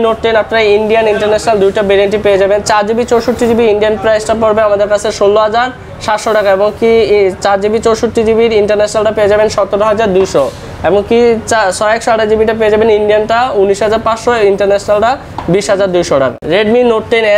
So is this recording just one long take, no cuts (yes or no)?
yes